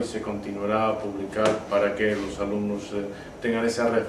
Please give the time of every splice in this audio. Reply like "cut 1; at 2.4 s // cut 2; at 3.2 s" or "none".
cut 1; at 1.3 s